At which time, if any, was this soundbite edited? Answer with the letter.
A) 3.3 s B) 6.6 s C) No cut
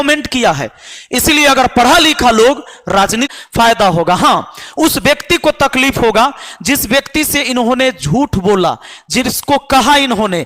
A